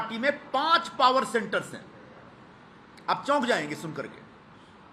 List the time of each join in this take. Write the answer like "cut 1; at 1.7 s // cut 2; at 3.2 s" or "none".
none